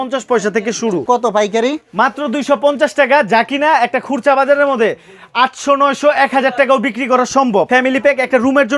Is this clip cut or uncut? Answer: cut